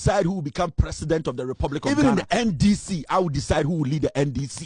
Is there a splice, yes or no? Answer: yes